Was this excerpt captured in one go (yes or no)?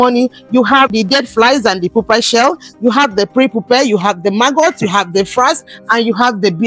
no